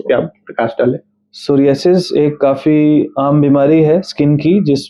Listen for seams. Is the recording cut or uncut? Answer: uncut